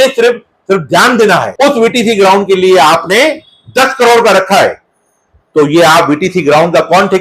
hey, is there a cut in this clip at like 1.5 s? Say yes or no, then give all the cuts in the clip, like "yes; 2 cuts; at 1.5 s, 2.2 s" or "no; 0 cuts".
yes; 1 cut; at 1.5 s